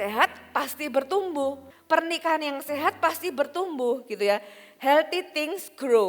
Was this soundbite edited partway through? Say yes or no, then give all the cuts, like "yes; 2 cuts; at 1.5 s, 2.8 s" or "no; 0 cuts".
yes; 1 cut; at 1.7 s